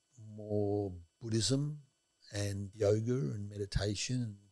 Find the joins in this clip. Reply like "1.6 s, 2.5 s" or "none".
2.6 s